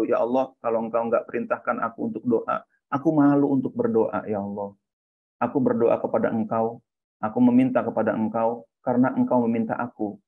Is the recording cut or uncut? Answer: uncut